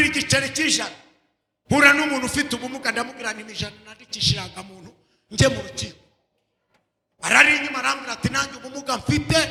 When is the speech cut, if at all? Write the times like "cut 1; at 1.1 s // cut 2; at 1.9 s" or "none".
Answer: none